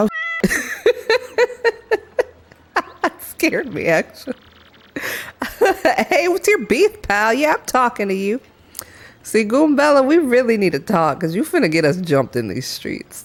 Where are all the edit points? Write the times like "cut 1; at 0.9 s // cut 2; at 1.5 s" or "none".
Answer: none